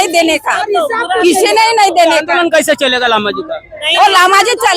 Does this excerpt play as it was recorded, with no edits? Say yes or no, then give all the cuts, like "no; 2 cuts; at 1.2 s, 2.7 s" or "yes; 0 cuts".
yes; 0 cuts